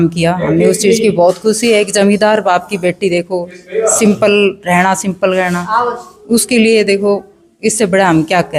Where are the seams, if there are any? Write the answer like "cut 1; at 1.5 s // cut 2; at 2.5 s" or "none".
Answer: none